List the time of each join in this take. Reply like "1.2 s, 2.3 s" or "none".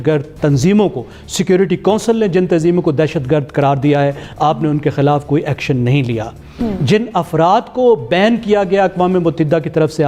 none